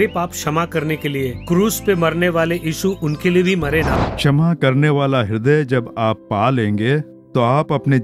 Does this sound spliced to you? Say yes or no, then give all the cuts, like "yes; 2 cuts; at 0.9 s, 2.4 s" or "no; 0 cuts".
yes; 1 cut; at 4.0 s